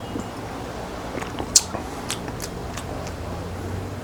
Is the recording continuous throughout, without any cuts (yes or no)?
yes